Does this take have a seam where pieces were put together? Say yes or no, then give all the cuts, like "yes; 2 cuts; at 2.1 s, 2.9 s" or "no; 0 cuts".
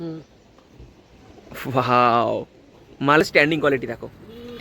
yes; 1 cut; at 3.2 s